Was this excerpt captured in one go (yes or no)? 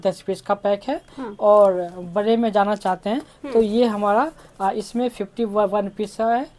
yes